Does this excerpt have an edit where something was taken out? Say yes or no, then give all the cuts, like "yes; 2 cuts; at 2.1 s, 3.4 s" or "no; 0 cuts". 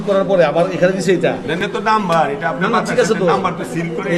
yes; 1 cut; at 1.6 s